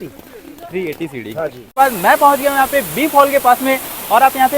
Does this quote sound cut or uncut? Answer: cut